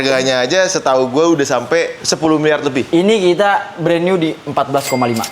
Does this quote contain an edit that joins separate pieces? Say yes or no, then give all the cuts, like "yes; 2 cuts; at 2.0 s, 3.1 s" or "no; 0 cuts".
no; 0 cuts